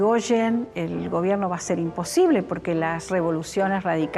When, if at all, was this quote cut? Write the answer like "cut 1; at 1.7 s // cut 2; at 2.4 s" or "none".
cut 1; at 3.0 s